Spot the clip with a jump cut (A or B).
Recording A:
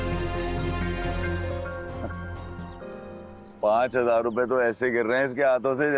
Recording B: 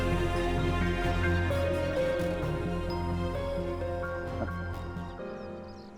A